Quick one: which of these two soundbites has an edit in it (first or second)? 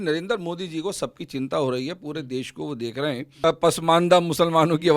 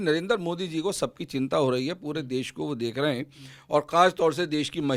first